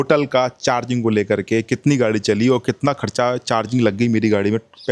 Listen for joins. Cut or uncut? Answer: uncut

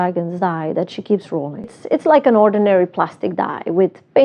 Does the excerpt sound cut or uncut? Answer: cut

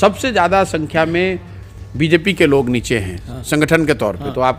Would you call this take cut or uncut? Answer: uncut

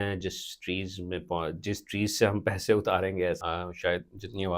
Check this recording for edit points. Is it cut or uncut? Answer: cut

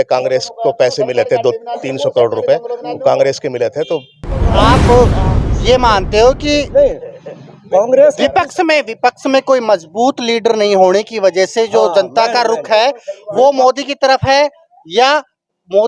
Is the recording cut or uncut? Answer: cut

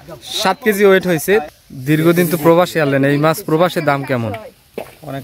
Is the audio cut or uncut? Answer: cut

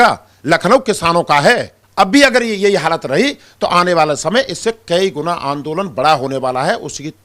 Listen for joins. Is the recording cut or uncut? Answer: cut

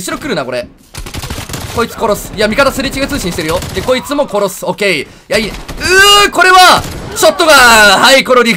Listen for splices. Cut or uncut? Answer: uncut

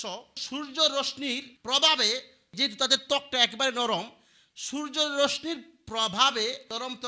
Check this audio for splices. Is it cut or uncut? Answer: uncut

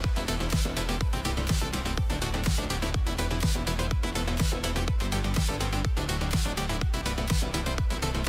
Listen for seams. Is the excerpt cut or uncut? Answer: uncut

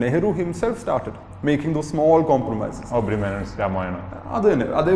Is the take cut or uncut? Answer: uncut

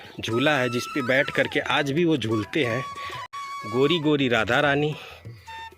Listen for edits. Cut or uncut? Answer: cut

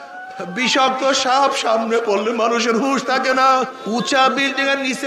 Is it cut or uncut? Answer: cut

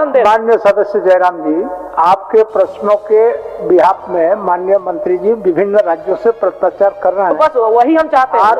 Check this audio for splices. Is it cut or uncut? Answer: uncut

